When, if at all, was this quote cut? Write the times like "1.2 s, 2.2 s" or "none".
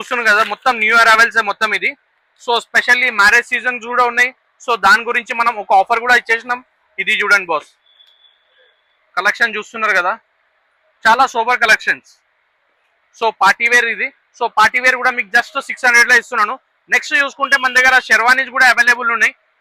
none